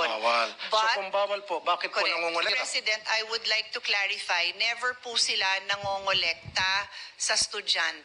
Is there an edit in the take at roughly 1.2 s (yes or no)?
no